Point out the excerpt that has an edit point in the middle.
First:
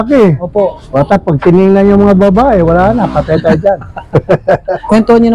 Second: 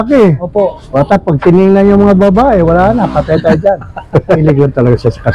second; 1 cut; at 4.4 s

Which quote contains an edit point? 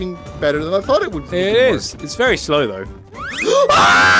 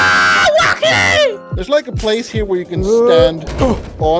second; 1 cut; at 1.5 s

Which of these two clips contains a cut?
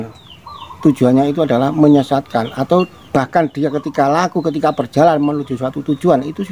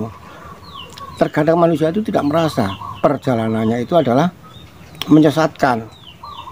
second; 1 cut; at 3.2 s

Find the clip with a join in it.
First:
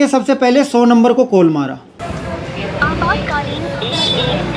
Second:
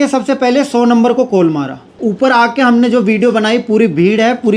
second; 1 cut; at 2.0 s

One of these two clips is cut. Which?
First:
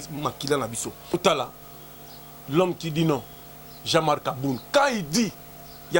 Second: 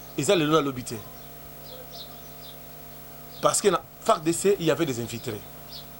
first; 1 cut; at 1.1 s

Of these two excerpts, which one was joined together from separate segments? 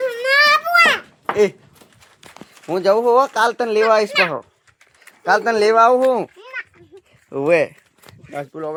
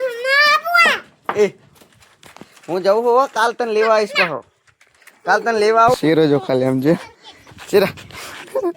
second; 1 cut; at 6.0 s

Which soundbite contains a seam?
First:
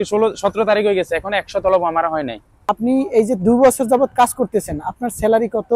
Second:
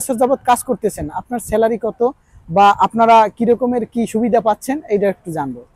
first; 1 cut; at 2.8 s

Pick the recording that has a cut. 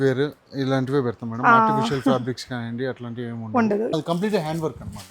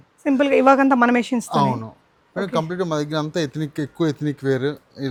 first; 1 cut; at 4.0 s

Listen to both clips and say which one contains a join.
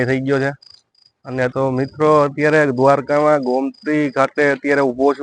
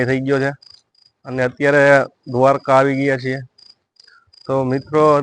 first; 1 cut; at 1.5 s

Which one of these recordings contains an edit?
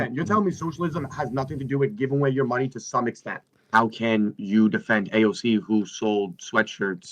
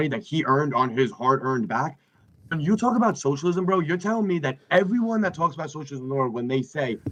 first; 1 cut; at 3.5 s

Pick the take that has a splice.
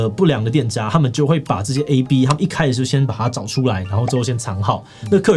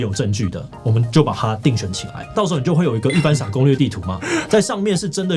second; 1 cut; at 2.3 s

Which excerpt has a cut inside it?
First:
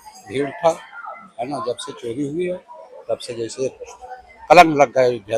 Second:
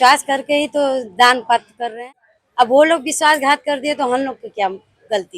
second; 1 cut; at 2.0 s

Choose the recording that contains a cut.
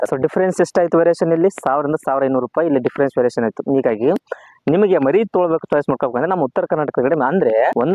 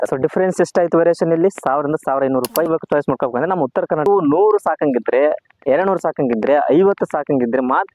second; 2 cuts; at 2.7 s, 4.1 s

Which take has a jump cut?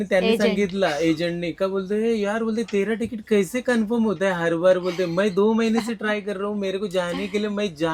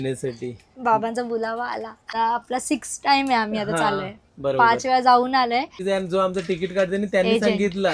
second; 2 cuts; at 2.0 s, 5.8 s

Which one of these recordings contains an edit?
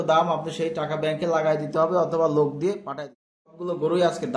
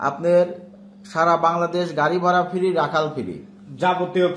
first; 1 cut; at 3.4 s

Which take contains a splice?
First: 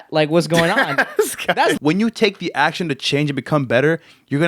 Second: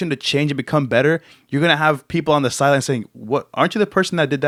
first; 1 cut; at 1.8 s

